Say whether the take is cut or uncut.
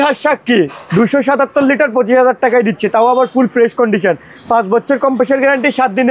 uncut